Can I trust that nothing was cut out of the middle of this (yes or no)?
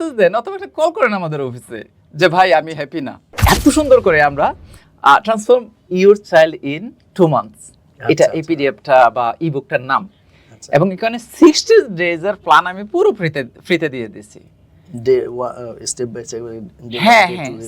no